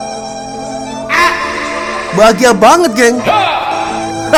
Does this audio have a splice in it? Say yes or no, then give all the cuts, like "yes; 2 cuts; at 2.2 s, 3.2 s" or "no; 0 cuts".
no; 0 cuts